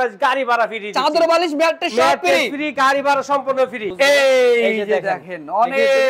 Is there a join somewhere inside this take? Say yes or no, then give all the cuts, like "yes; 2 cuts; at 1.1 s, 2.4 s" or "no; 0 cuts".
yes; 1 cut; at 3.9 s